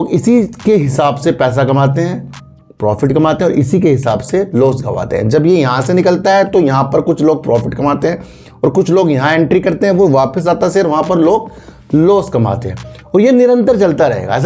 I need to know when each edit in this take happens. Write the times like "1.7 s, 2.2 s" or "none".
none